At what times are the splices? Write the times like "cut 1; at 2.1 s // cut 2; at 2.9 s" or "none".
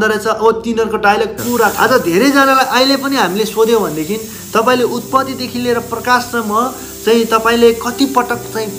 cut 1; at 1.7 s